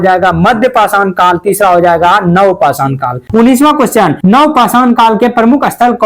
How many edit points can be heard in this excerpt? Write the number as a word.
two